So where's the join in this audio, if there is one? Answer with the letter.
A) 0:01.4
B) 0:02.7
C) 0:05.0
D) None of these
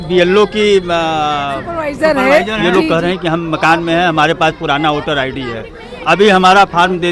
B